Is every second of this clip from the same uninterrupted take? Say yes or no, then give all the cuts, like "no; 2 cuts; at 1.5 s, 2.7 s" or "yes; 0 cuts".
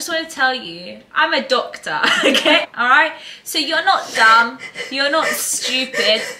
no; 1 cut; at 2.6 s